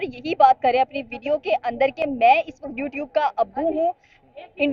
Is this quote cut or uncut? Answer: uncut